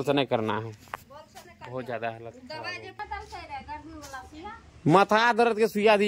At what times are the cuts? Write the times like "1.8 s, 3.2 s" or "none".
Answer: 2.9 s